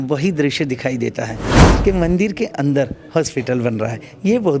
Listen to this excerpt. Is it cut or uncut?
cut